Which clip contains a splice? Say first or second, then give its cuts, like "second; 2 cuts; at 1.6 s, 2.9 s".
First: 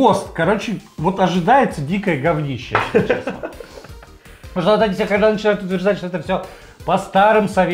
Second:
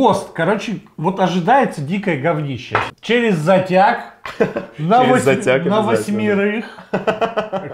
second; 1 cut; at 2.9 s